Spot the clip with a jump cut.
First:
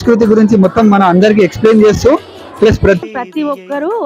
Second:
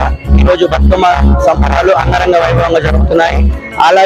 first; 1 cut; at 3.0 s

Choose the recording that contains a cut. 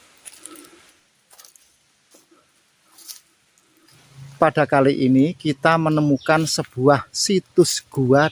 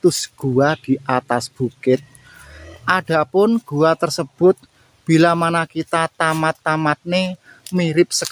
first; 2 cuts; at 1.0 s, 4.0 s

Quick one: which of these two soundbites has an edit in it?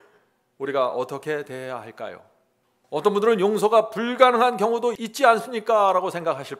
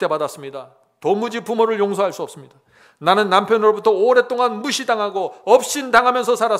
first; 1 cut; at 5.0 s

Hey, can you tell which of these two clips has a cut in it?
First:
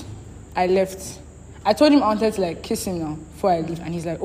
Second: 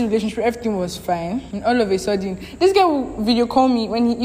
second; 1 cut; at 1.5 s

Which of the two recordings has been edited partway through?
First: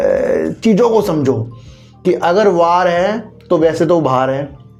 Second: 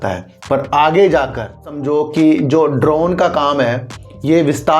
second; 1 cut; at 1.8 s

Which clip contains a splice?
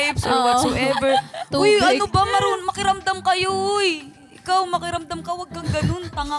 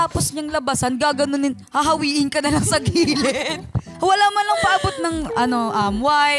second; 1 cut; at 3.9 s

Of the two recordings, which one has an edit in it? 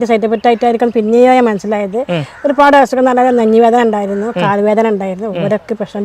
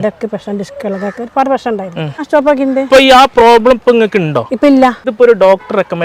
second; 2 cuts; at 2.2 s, 5.1 s

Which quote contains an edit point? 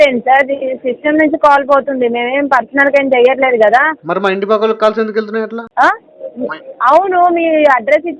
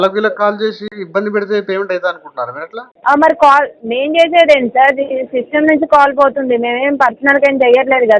second; 1 cut; at 0.9 s

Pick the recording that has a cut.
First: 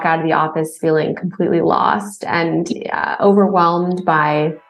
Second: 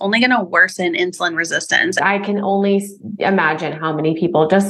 second; 1 cut; at 1.9 s

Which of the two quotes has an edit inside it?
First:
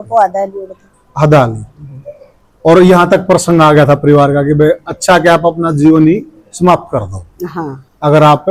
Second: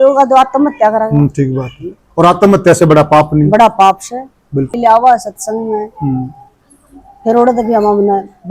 second; 1 cut; at 4.7 s

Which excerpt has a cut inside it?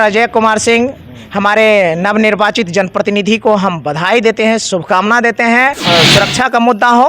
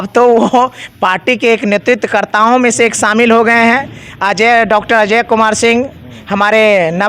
first; 1 cut; at 5.8 s

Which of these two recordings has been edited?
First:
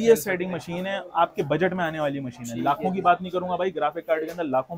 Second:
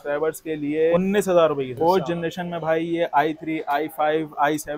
second; 2 cuts; at 0.9 s, 1.7 s

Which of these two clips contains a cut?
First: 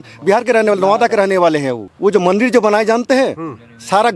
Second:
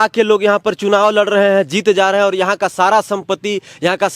first; 1 cut; at 1.8 s

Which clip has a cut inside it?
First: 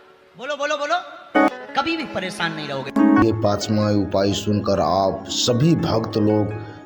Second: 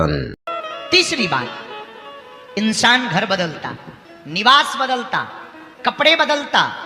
first; 2 cuts; at 1.4 s, 3.2 s

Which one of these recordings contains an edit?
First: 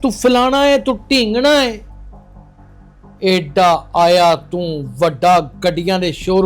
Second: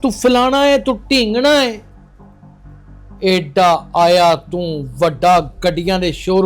first; 2 cuts; at 1.9 s, 3.2 s

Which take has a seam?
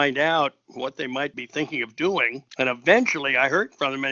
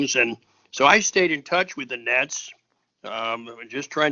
first; 2 cuts; at 1.4 s, 2.4 s

